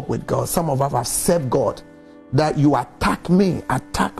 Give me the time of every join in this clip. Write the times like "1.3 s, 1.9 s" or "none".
none

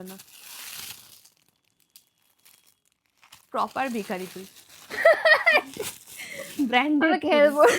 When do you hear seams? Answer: none

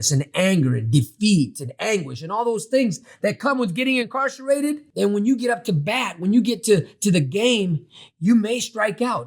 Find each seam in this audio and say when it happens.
4.9 s

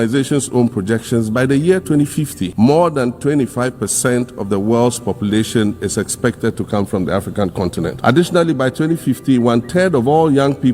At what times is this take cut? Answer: 2.4 s, 8.0 s

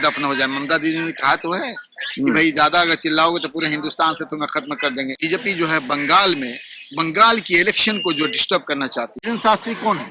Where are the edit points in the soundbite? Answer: 5.2 s, 9.2 s

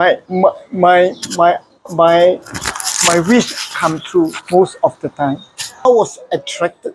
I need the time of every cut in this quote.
5.9 s

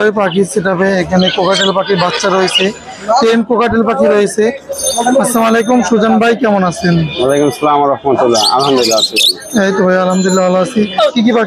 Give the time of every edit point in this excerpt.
none

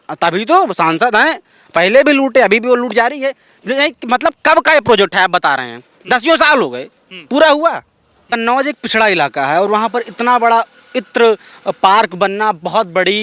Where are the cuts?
8.3 s

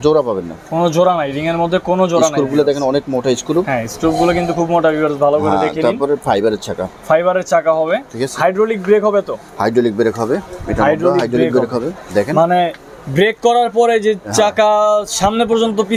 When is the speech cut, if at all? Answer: none

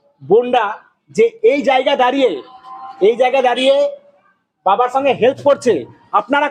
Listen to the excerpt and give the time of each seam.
none

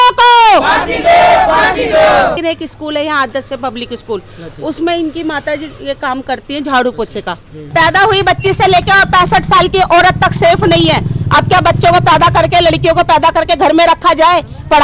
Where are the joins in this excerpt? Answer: 2.4 s, 7.5 s

